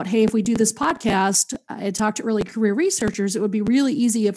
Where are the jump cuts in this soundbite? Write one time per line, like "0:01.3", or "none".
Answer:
0:02.5